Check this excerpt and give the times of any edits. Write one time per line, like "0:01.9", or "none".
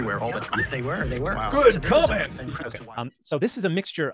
0:02.7